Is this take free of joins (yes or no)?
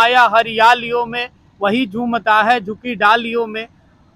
yes